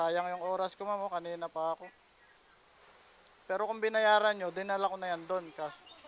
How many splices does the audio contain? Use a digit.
0